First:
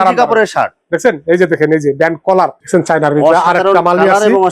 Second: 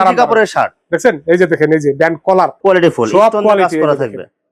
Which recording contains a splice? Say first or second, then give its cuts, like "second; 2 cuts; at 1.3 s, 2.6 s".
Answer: first; 1 cut; at 2.5 s